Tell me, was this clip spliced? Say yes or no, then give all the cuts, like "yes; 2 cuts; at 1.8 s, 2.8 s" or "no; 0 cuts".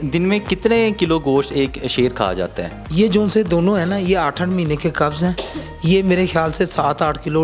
no; 0 cuts